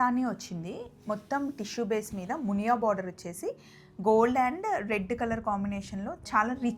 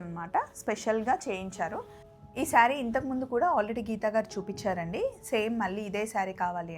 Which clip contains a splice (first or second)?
second